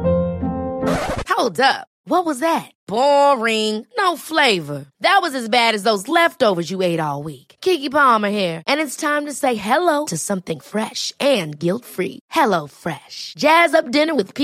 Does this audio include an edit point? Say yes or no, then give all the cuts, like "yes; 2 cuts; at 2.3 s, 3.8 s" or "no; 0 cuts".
no; 0 cuts